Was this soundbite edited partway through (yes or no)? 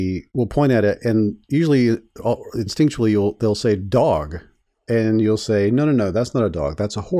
no